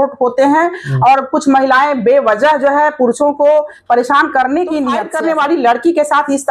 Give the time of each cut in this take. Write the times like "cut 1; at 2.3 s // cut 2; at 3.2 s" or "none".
cut 1; at 5.1 s

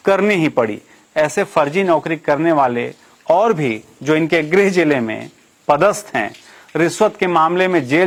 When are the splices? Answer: none

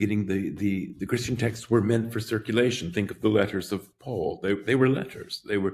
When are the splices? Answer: none

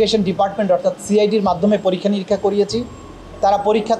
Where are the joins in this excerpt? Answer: none

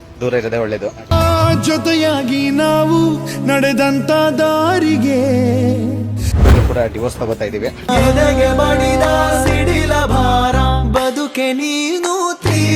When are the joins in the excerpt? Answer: cut 1; at 1.0 s

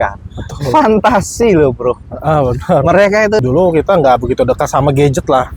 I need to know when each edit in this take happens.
cut 1; at 3.4 s

